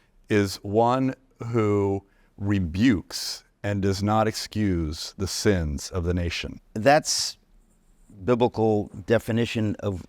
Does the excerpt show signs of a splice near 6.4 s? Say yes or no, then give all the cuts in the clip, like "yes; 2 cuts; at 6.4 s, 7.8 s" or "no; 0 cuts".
yes; 1 cut; at 6.4 s